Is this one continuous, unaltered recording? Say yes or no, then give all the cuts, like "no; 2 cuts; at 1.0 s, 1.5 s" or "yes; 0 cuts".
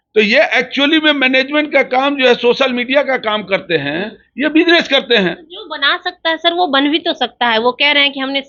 yes; 0 cuts